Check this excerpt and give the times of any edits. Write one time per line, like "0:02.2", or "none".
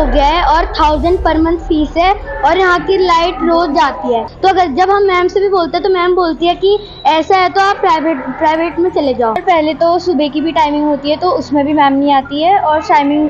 0:04.3
0:09.4